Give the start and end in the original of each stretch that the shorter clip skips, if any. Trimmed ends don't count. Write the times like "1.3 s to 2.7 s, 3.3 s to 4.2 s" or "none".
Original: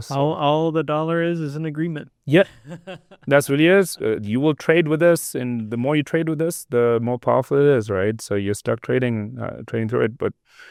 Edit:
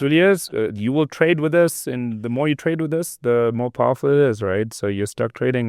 none